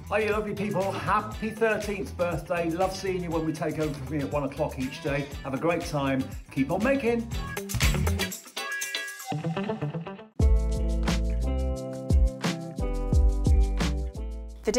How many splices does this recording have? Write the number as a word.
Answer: one